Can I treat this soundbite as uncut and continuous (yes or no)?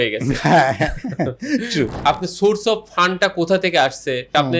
no